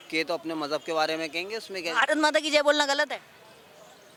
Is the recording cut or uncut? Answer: uncut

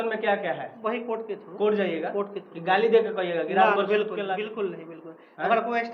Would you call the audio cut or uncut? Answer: cut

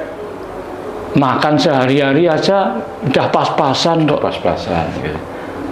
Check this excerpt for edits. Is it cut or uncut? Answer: uncut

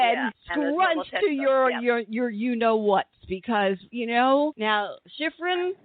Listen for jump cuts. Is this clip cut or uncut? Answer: cut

